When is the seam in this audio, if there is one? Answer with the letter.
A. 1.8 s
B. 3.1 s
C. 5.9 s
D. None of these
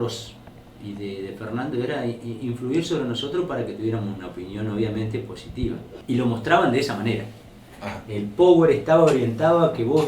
C